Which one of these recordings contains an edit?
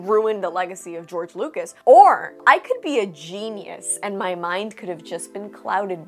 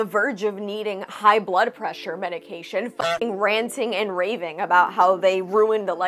first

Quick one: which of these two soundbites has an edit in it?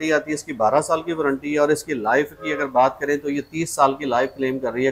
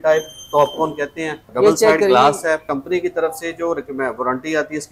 second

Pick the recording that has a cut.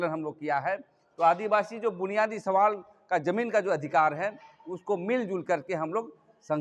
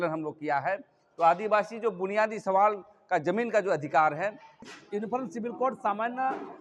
second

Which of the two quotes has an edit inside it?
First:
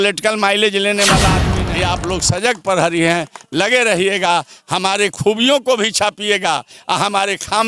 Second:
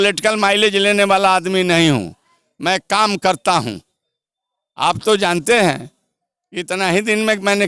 first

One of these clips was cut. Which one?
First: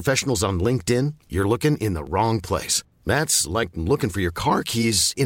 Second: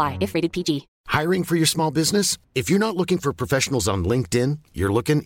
second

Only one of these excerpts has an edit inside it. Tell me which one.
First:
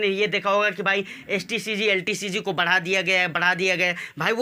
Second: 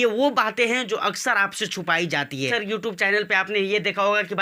second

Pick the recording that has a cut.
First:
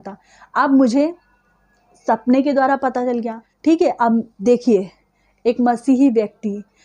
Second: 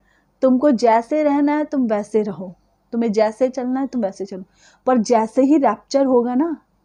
first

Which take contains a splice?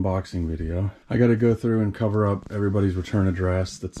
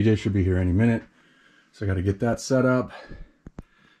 first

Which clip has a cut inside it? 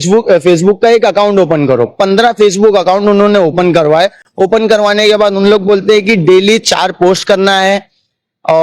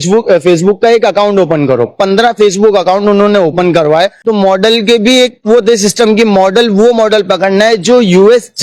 second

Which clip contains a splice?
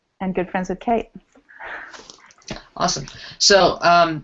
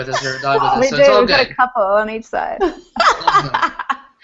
first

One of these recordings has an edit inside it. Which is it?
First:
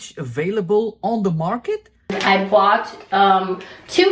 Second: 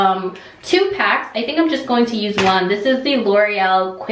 first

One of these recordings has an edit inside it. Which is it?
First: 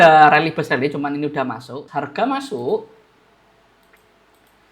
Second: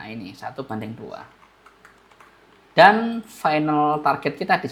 first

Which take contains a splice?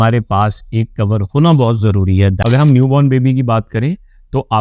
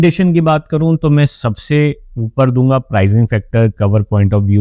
first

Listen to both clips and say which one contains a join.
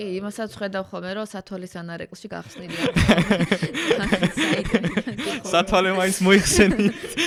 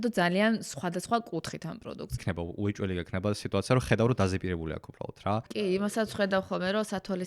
second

